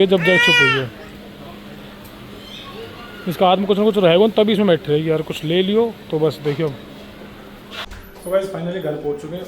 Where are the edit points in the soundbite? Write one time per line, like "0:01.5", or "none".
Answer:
0:07.9